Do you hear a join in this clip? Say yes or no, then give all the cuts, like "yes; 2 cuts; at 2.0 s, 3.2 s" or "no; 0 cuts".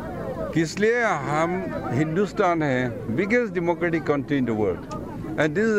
no; 0 cuts